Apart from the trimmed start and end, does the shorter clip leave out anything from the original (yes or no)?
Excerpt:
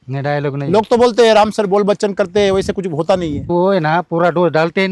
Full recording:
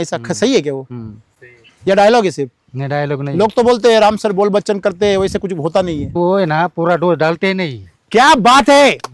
no